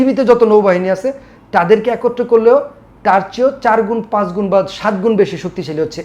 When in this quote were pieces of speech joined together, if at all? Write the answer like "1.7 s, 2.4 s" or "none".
none